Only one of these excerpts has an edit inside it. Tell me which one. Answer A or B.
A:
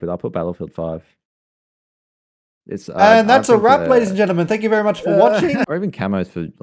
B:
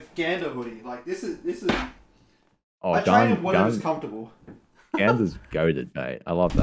A